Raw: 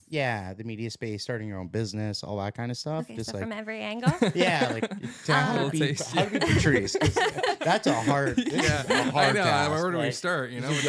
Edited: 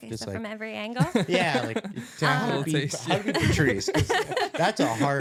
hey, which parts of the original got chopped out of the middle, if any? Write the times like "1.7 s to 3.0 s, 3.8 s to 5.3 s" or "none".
none